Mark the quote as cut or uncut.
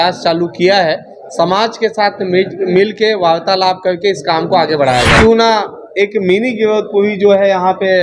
cut